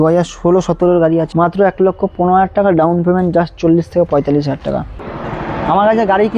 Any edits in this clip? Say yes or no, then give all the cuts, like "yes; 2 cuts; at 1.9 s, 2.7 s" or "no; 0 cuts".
yes; 2 cuts; at 1.3 s, 5.0 s